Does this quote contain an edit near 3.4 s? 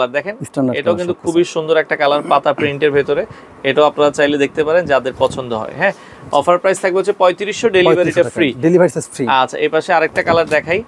no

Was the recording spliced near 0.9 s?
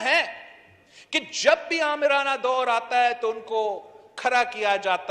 no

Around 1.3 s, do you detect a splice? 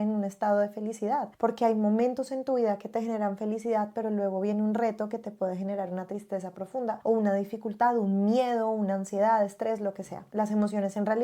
no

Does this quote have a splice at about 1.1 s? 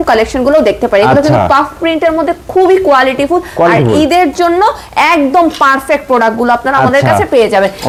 no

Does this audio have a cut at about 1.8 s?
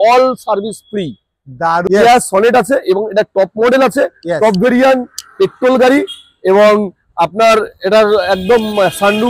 yes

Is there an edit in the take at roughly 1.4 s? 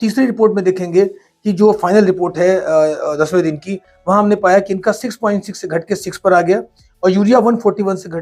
no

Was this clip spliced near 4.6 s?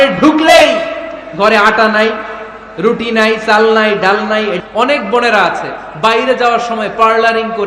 yes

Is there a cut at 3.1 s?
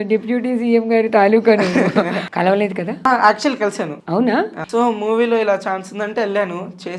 yes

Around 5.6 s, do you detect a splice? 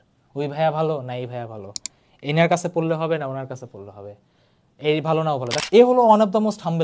yes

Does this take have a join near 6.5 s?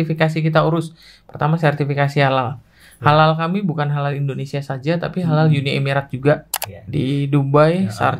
yes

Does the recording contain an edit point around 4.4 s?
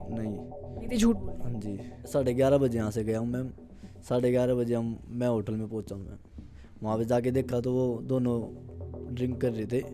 no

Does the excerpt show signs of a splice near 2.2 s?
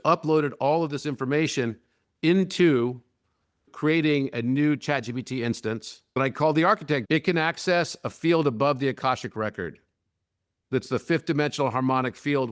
no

